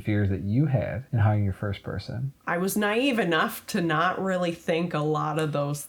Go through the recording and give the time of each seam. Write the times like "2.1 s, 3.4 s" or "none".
1.0 s, 2.3 s